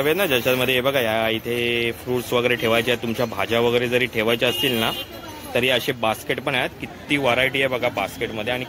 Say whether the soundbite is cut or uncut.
uncut